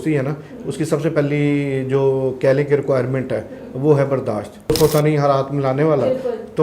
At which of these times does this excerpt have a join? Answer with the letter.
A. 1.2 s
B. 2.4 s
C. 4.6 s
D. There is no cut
C